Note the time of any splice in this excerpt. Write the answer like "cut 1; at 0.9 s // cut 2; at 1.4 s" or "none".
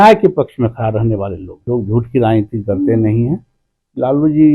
cut 1; at 1.6 s